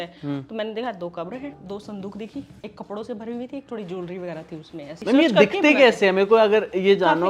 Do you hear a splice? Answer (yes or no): yes